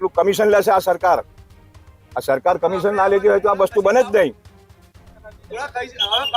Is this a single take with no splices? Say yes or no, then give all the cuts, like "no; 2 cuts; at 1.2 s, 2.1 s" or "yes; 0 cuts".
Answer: yes; 0 cuts